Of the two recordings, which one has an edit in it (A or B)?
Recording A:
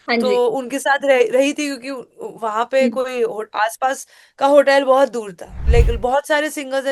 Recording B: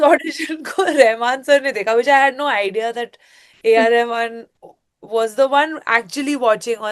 A